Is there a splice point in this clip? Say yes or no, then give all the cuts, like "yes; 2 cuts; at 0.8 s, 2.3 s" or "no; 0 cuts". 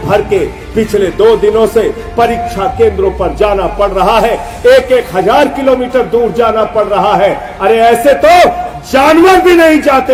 no; 0 cuts